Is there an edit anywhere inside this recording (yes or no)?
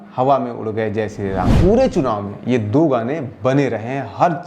yes